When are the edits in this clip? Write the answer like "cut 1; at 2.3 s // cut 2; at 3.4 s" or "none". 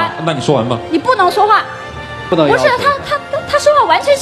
cut 1; at 2.2 s

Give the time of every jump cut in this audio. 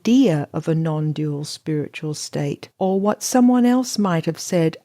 cut 1; at 2.7 s

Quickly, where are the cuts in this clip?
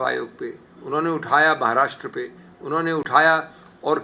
none

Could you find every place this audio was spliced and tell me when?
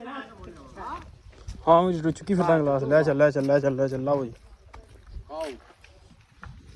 cut 1; at 1.0 s

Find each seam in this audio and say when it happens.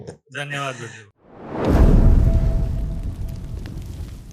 cut 1; at 1.0 s

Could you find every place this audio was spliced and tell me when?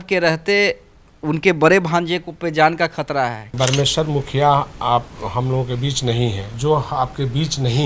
cut 1; at 3.5 s // cut 2; at 6.6 s

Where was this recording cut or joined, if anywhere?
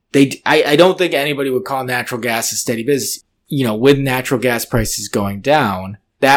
cut 1; at 3.1 s

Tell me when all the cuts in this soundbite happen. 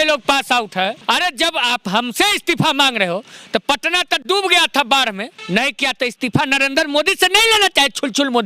cut 1; at 1.0 s // cut 2; at 5.3 s

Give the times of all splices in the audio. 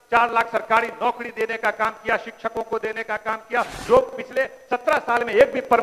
cut 1; at 3.7 s

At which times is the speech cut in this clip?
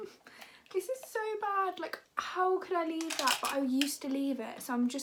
none

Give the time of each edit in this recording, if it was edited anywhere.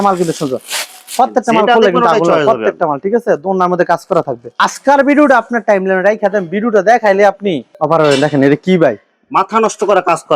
cut 1; at 4.6 s

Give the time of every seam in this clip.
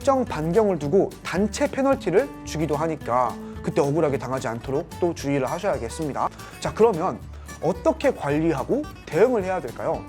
cut 1; at 6.5 s

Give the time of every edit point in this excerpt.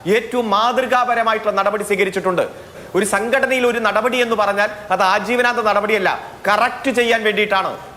cut 1; at 2.8 s

